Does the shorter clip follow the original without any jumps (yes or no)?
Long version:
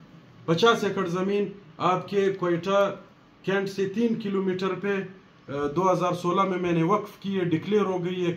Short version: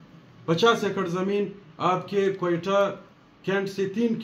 yes